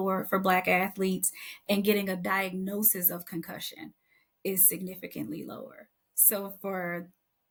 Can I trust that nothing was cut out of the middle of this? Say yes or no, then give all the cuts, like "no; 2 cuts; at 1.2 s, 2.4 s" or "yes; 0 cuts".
yes; 0 cuts